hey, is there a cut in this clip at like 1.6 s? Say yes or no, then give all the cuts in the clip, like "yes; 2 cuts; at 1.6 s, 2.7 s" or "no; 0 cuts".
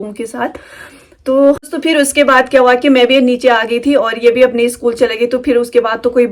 yes; 1 cut; at 1.6 s